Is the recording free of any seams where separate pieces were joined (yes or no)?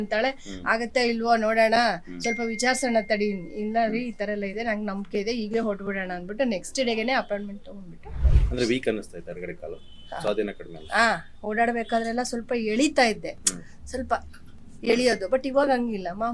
no